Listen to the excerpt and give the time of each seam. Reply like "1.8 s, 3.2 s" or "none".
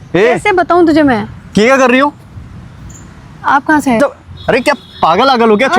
4.0 s

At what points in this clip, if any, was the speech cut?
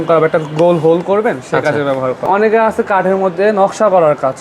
2.2 s

